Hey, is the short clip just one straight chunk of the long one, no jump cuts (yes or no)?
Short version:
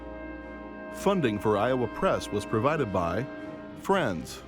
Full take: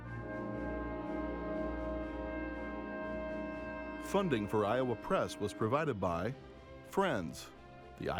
no